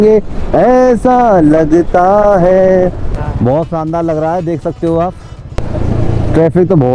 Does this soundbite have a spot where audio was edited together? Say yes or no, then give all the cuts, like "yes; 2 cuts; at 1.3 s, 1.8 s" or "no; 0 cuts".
yes; 2 cuts; at 3.1 s, 5.6 s